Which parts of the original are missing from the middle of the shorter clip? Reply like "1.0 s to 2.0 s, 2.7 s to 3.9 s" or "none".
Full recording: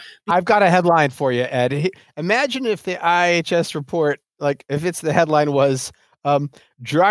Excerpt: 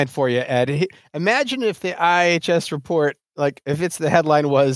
none